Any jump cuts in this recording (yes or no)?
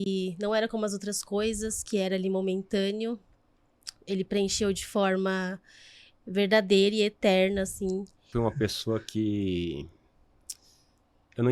yes